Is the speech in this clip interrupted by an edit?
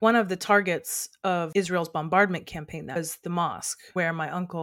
yes; 3 cuts; at 1.5 s, 3.0 s, 3.7 s

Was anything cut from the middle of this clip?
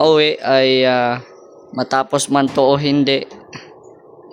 no; 0 cuts

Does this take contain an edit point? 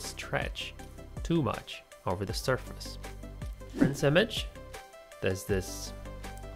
yes; 1 cut; at 3.9 s

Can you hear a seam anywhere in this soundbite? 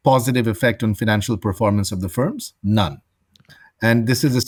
no; 0 cuts

